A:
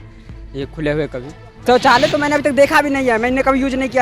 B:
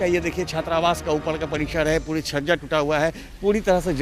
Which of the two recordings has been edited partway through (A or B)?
A